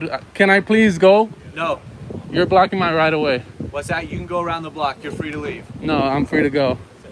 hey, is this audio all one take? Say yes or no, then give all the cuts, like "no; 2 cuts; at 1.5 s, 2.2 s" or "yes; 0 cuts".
yes; 0 cuts